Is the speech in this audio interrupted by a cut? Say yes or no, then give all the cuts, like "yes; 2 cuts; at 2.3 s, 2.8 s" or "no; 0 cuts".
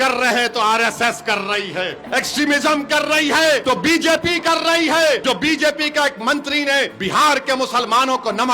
yes; 4 cuts; at 2.0 s, 3.6 s, 5.2 s, 6.9 s